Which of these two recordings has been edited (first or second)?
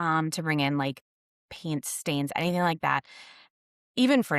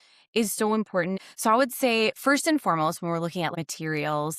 second